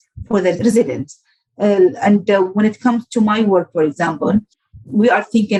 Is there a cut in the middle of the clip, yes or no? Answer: no